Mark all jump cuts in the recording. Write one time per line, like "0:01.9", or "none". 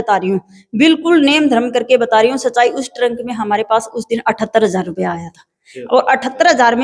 none